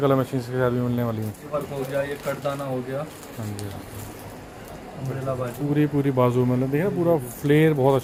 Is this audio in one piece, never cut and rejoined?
yes; 0 cuts

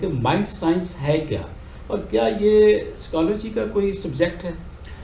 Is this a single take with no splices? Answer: yes; 0 cuts

